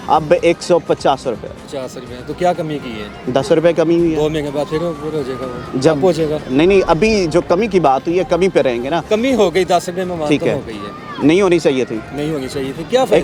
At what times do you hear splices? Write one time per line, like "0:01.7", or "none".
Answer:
none